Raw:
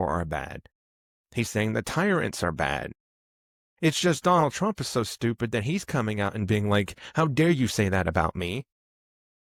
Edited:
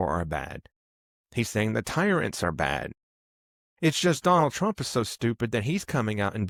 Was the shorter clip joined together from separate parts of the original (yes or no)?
no